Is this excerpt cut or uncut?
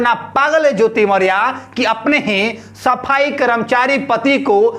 uncut